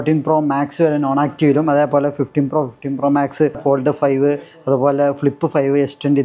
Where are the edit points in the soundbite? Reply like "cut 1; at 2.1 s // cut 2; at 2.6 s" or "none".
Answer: cut 1; at 3.6 s